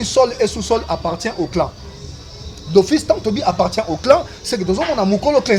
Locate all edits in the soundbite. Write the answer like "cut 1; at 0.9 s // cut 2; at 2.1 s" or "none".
none